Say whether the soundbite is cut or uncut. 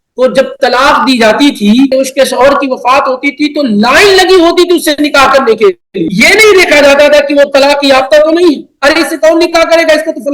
cut